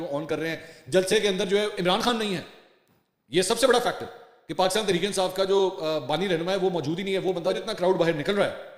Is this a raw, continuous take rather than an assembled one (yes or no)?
no